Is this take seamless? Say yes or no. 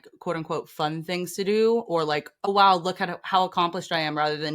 no